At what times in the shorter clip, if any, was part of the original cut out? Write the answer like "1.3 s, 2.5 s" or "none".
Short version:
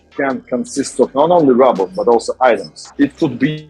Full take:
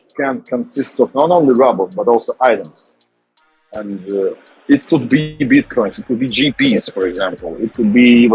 2.8 s